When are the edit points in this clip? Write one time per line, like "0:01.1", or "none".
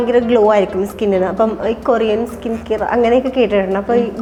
none